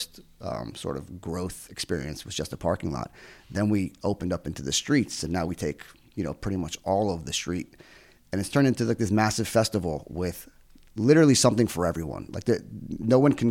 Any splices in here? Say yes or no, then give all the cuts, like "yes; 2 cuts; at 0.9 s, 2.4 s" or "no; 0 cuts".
no; 0 cuts